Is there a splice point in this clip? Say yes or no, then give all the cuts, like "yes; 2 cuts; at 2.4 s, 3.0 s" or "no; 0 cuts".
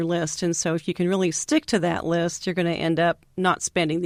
no; 0 cuts